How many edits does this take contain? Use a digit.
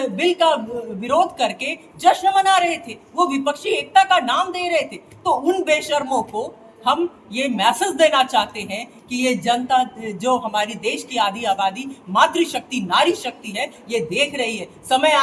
0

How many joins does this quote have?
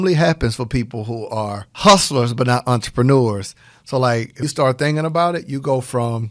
2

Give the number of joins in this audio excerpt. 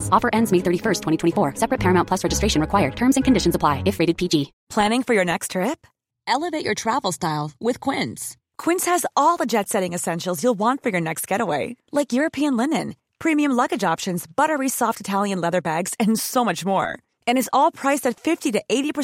1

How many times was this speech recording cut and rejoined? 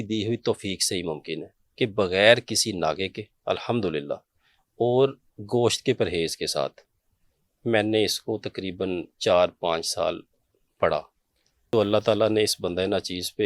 1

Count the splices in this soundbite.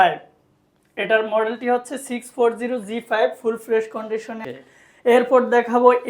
1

